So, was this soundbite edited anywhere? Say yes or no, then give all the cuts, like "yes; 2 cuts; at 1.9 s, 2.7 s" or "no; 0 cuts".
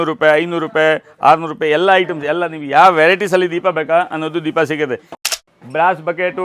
yes; 1 cut; at 5.1 s